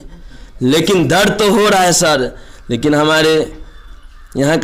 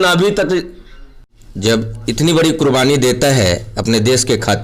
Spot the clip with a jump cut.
second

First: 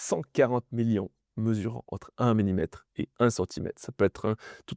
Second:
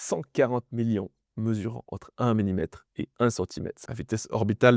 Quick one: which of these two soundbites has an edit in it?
second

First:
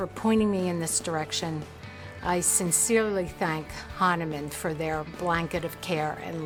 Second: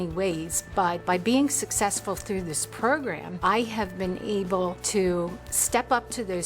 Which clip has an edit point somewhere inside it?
second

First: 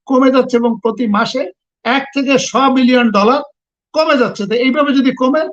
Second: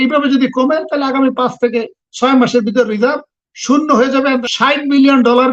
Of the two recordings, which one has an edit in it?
second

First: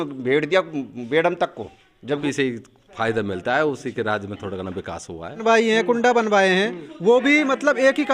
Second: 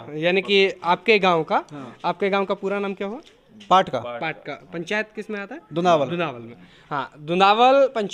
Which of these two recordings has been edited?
first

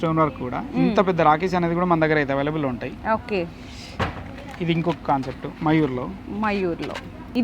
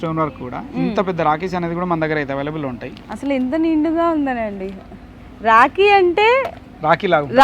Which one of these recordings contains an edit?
second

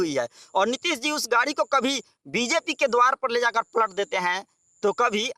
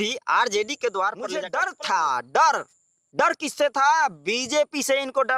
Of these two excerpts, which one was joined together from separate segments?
second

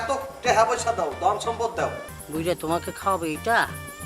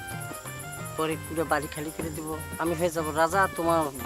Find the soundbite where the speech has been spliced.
first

